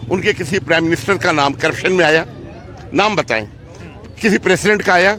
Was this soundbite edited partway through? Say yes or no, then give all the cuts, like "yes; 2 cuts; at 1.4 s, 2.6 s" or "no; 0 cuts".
no; 0 cuts